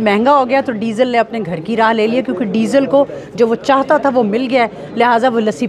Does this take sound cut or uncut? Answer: uncut